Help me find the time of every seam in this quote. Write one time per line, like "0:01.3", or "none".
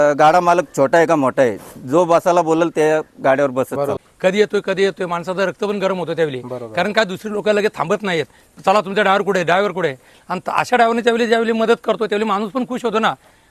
0:04.0